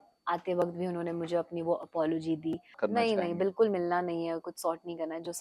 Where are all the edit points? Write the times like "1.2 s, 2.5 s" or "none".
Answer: 2.7 s